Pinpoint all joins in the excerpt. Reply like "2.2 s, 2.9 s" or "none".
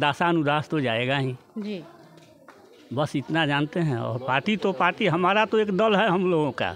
none